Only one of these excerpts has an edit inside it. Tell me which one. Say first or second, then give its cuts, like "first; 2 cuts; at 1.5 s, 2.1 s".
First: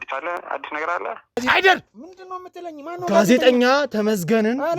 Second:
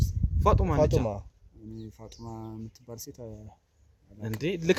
first; 1 cut; at 1.4 s